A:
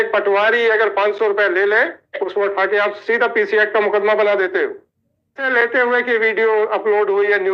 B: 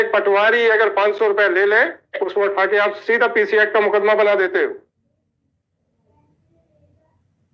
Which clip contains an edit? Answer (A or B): A